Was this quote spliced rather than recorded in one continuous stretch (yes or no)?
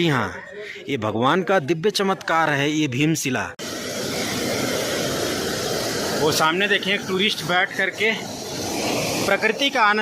yes